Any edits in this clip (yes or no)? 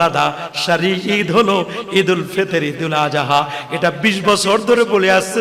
no